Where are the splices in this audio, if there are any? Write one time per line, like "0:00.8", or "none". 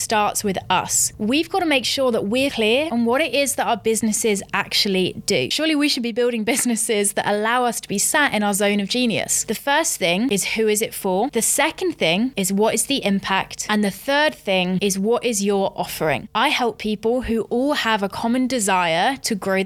0:01.1
0:02.6
0:05.5
0:09.4
0:10.3
0:11.3
0:13.6
0:14.8
0:16.3